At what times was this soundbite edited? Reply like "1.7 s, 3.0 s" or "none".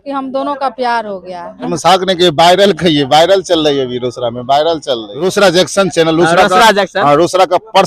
1.7 s, 5.2 s